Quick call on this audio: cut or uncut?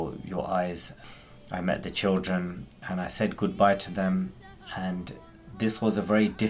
cut